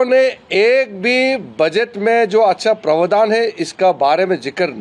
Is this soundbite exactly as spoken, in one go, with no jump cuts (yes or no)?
yes